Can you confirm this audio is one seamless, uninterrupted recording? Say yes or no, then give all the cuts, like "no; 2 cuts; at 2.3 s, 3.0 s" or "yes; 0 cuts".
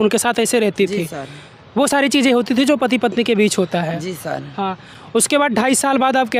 yes; 0 cuts